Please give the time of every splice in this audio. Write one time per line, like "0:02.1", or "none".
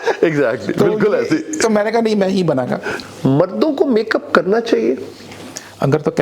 0:03.0